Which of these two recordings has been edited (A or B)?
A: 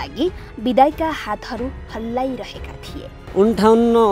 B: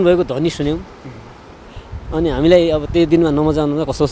A